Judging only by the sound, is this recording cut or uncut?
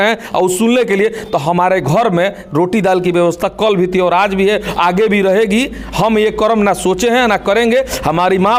uncut